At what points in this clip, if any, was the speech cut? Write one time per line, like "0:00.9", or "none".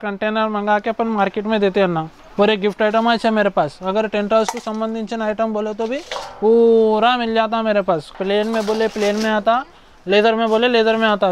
0:02.2
0:08.1

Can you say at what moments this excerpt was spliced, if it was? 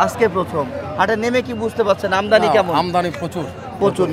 none

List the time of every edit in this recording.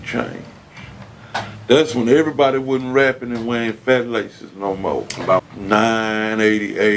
0:05.4

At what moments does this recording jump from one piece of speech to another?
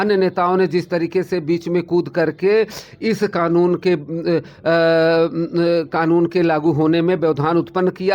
none

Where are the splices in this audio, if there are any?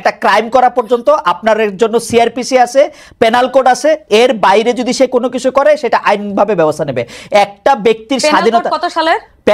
none

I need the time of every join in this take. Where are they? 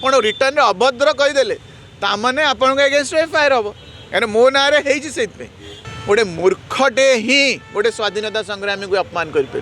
0:05.8

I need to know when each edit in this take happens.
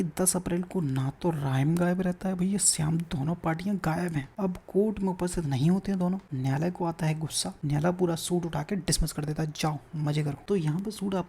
0:04.3
0:06.3
0:07.5
0:10.4

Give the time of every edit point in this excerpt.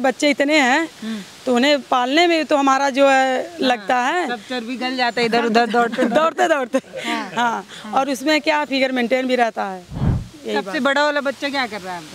none

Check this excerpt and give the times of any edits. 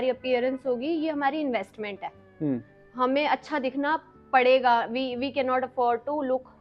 none

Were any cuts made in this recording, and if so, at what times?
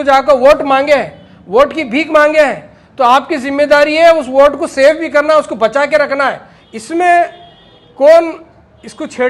0:06.5

